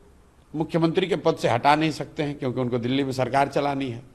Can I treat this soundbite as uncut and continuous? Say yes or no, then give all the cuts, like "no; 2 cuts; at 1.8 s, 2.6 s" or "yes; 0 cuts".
yes; 0 cuts